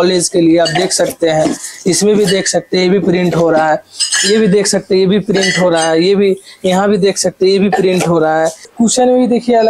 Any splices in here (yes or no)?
yes